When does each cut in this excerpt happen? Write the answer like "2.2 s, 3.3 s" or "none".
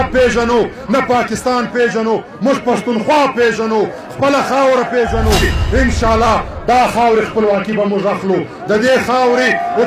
5.4 s